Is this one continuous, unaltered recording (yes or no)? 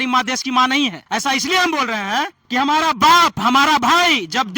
no